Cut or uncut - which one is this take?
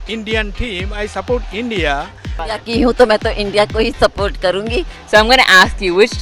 cut